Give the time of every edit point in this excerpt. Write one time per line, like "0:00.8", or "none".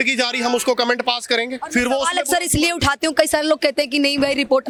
none